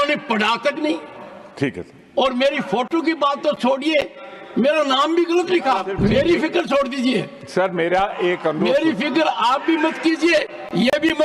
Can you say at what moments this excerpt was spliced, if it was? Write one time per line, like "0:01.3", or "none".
0:05.9

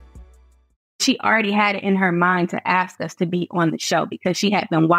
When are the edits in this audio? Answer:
0:01.0

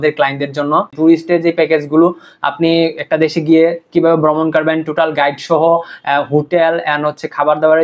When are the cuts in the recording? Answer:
0:00.9

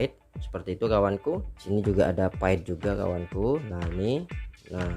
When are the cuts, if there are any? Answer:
0:01.5

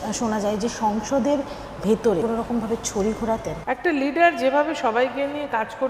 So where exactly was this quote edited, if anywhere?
0:02.2
0:03.5

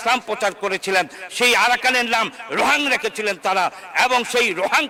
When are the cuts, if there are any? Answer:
none

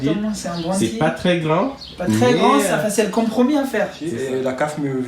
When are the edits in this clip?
0:04.0

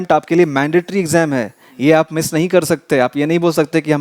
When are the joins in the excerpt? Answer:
none

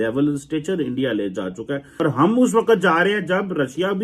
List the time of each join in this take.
0:01.9

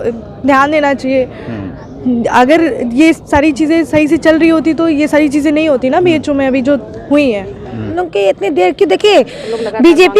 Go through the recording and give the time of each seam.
0:07.9

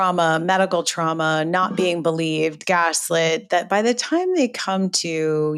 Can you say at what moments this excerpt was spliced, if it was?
none

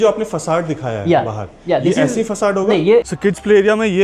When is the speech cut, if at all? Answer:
0:03.0

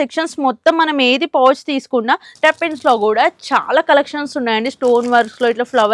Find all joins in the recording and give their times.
0:02.3

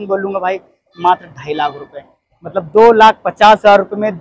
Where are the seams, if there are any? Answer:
none

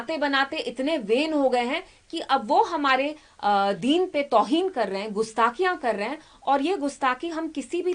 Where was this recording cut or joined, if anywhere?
none

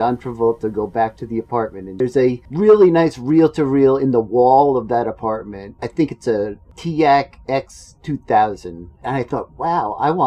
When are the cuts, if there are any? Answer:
0:02.2
0:05.6
0:06.7
0:08.9

